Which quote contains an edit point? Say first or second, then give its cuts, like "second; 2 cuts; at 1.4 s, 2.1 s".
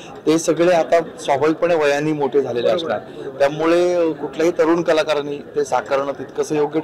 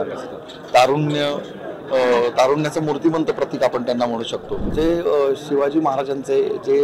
second; 1 cut; at 4.6 s